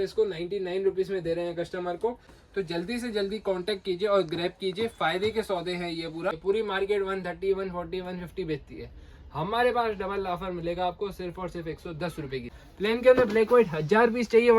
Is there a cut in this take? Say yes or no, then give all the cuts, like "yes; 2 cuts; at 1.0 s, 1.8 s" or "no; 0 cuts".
yes; 3 cuts; at 2.3 s, 6.4 s, 12.6 s